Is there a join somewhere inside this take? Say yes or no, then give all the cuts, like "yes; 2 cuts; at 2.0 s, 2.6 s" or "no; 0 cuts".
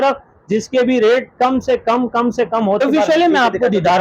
yes; 1 cut; at 2.8 s